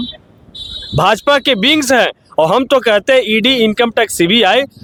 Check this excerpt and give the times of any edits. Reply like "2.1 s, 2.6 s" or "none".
none